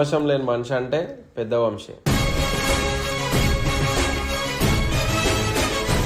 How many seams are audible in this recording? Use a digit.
0